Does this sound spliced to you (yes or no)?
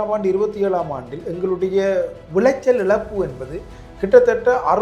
no